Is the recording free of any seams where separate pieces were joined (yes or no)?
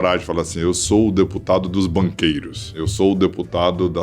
no